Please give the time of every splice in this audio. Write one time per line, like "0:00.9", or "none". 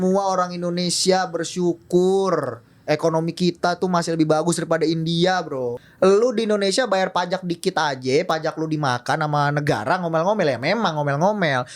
0:05.8